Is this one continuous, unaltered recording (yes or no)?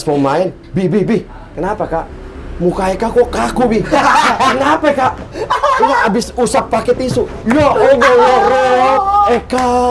yes